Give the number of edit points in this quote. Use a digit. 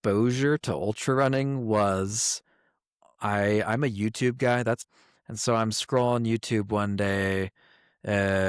1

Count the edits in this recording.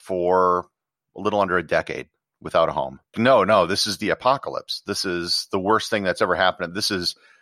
1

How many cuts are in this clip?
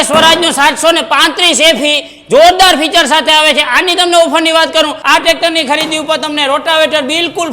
1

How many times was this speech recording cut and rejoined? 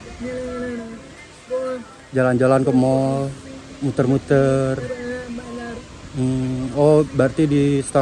0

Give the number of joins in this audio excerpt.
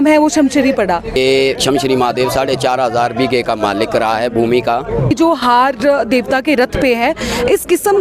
2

